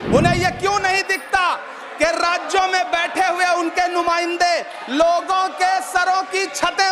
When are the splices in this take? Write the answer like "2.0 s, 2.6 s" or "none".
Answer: none